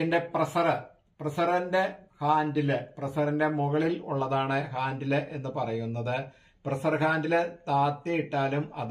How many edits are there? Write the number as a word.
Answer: zero